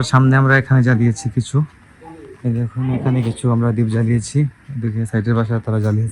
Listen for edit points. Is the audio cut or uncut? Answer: uncut